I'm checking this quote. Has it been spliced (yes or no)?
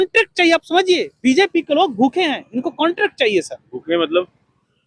no